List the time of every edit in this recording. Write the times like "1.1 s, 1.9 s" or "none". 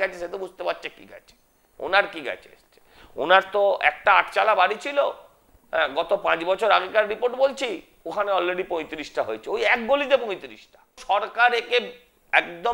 11.0 s